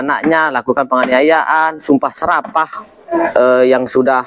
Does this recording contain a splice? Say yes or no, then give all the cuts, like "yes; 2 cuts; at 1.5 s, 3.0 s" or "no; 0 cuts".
yes; 1 cut; at 3.2 s